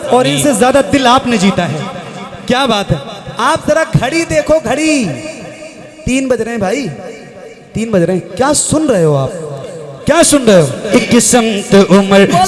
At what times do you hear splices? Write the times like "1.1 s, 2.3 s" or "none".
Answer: 10.9 s